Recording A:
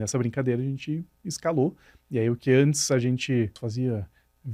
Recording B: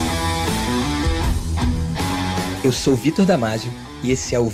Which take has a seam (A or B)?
A